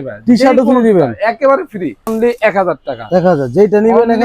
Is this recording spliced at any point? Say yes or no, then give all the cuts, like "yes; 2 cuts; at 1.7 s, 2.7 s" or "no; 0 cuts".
yes; 1 cut; at 2.1 s